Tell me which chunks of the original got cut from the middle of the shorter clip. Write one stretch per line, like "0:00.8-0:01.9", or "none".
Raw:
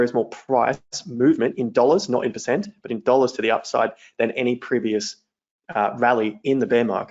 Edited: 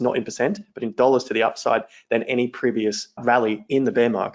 0:05.3-0:05.9